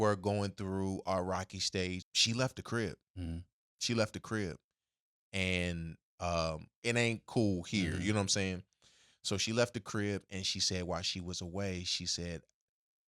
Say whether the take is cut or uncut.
cut